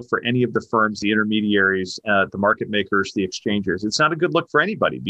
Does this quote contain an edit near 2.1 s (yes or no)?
no